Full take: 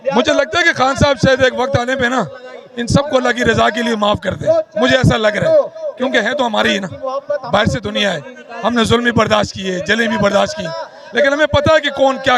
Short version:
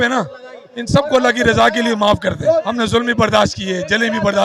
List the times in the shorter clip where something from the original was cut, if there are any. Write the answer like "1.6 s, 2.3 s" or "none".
2.7 s

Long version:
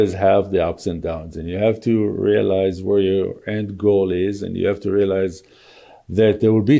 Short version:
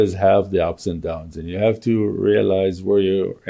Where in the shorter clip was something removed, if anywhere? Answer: none

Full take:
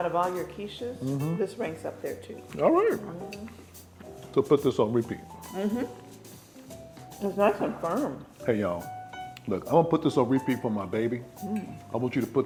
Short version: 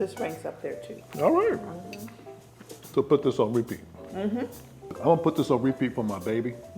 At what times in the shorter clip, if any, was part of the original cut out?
5.0 s

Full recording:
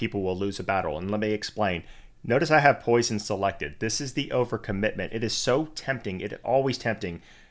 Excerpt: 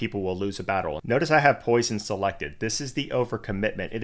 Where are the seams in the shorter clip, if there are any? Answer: 1.0 s

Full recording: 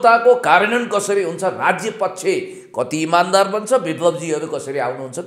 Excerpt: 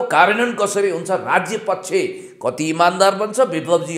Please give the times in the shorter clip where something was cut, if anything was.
none

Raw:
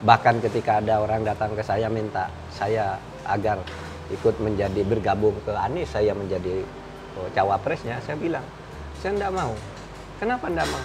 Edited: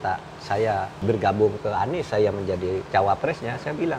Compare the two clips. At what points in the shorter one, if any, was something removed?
1.0 s, 2.9 s

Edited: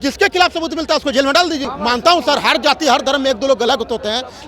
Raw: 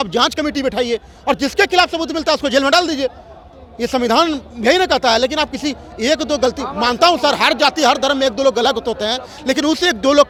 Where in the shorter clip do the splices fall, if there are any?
1.6 s

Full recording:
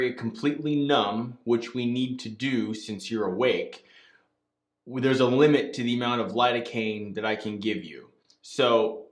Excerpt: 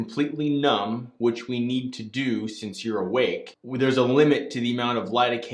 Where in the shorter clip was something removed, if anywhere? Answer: 3.5 s

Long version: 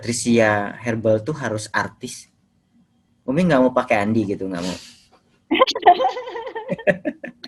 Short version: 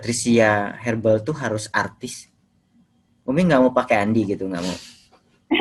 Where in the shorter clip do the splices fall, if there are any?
none

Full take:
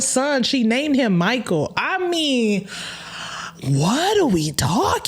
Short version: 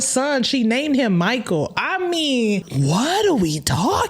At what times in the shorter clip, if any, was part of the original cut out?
2.7 s

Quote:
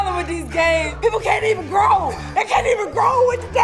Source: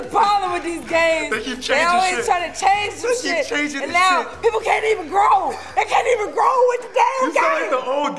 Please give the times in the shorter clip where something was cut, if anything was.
0.9 s

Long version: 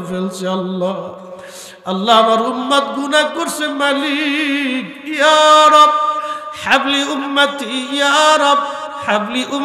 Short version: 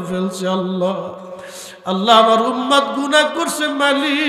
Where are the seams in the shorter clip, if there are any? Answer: none

